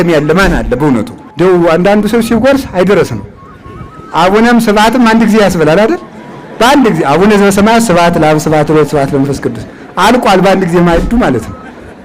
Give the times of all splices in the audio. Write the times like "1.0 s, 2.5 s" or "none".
1.2 s